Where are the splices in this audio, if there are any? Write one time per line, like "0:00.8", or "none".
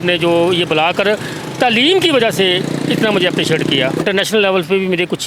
0:04.0